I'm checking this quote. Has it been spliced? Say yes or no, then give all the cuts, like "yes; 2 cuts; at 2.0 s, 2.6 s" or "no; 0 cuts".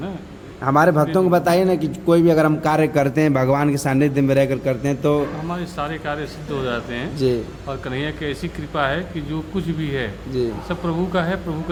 no; 0 cuts